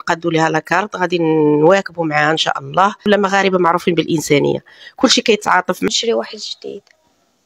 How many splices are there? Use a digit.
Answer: 2